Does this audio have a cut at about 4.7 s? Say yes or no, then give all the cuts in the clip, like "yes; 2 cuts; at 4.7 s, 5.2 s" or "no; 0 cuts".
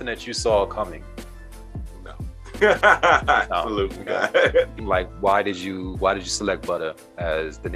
yes; 1 cut; at 4.7 s